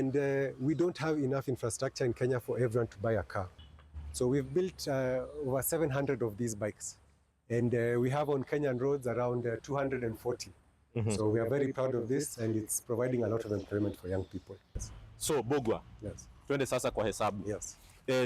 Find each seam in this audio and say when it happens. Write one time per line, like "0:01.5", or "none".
0:03.5
0:14.8